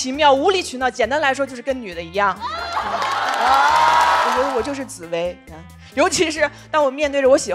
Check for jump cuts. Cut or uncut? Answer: cut